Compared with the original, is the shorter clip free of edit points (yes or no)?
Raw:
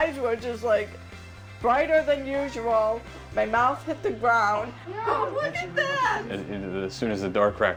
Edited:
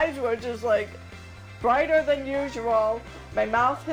yes